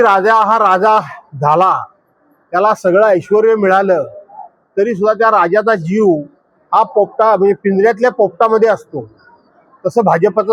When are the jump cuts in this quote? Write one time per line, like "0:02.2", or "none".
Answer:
none